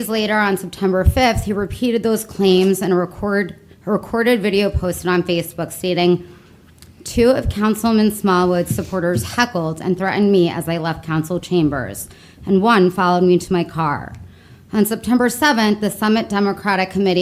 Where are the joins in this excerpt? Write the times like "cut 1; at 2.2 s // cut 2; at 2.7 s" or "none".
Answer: none